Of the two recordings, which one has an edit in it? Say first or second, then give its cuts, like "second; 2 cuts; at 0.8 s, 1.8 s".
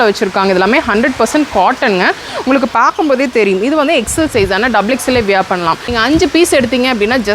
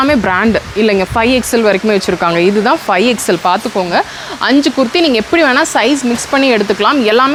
first; 1 cut; at 5.8 s